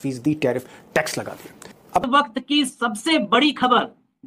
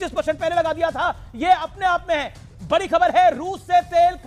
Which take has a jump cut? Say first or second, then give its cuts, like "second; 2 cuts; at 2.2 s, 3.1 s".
first; 1 cut; at 2.1 s